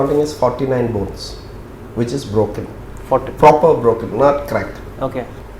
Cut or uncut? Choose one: uncut